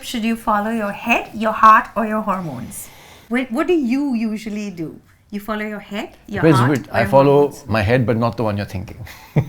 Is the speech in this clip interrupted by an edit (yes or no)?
no